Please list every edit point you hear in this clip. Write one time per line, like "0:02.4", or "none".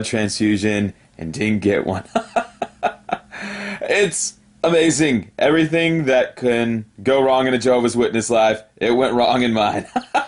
none